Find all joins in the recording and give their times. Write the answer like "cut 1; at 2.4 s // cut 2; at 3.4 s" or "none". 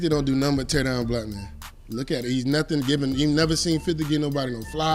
none